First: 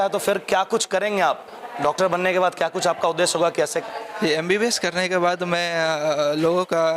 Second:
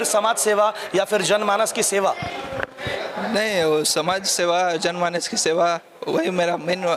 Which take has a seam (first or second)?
first